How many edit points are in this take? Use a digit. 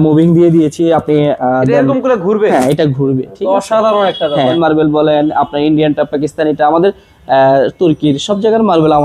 1